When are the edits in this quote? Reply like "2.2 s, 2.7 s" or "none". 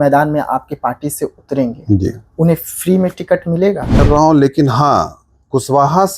4.0 s